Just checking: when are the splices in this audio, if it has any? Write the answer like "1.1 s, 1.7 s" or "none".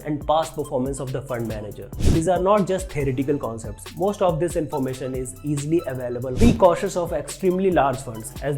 2.0 s, 6.5 s